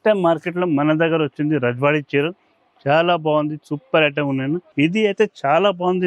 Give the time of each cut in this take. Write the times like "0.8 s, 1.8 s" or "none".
4.7 s